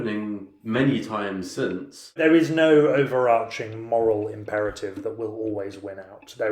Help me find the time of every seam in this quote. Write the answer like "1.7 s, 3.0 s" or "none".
2.2 s